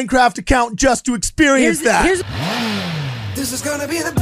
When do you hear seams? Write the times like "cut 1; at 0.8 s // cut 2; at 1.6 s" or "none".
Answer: cut 1; at 2.2 s